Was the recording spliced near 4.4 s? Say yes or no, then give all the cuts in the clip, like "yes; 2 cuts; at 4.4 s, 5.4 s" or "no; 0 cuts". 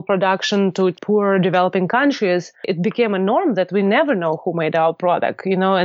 no; 2 cuts; at 1.0 s, 2.7 s